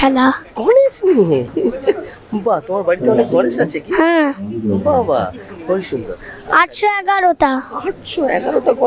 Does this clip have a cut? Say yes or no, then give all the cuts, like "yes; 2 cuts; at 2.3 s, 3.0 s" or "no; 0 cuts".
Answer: no; 0 cuts